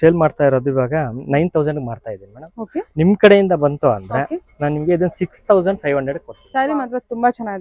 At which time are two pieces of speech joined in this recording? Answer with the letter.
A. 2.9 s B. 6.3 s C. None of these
B